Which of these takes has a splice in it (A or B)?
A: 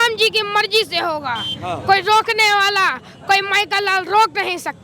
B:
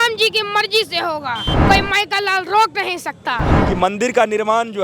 B